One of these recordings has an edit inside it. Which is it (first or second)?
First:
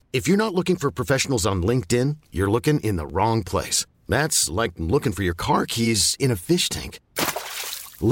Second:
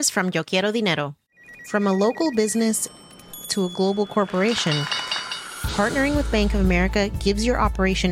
second